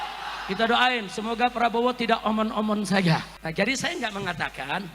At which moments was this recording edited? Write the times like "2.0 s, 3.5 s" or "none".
3.4 s